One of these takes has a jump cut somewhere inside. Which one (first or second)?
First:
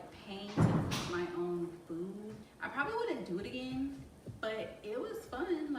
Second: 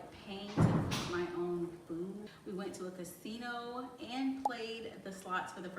second